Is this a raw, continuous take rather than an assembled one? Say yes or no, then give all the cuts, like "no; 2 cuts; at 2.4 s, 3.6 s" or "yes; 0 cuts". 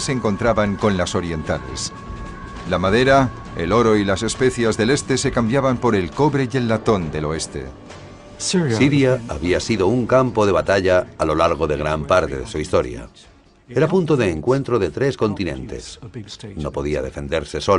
no; 1 cut; at 11.6 s